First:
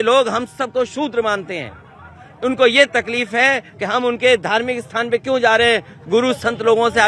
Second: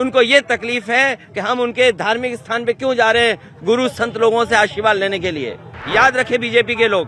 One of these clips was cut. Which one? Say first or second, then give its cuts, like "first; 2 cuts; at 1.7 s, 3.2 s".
second; 1 cut; at 5.8 s